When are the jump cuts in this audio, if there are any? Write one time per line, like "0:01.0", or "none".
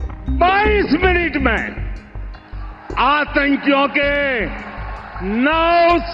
none